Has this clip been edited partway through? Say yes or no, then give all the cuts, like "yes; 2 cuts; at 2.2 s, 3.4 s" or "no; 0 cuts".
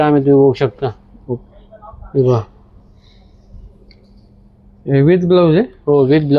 no; 0 cuts